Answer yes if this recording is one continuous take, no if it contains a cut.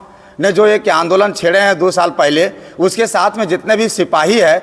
yes